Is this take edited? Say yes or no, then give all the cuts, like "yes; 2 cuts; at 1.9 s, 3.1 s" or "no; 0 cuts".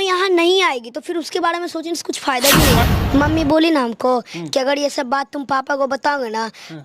yes; 1 cut; at 2.9 s